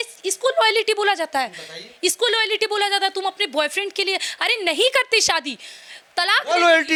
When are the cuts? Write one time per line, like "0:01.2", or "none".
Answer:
none